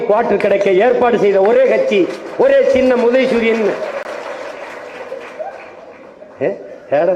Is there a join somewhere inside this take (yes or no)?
no